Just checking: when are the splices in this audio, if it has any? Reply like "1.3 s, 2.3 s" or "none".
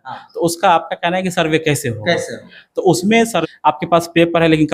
3.4 s